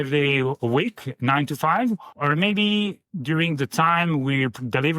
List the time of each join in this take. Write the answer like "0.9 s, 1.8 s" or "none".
2.1 s, 3.1 s